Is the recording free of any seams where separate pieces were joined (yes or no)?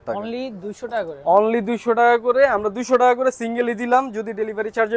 yes